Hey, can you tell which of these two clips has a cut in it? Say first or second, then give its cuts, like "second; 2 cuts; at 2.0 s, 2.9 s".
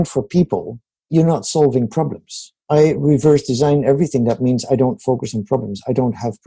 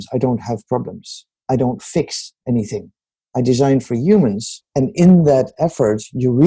first; 2 cuts; at 1.1 s, 2.6 s